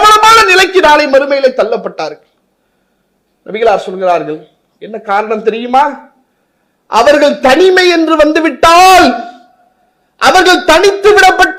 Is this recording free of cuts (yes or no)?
yes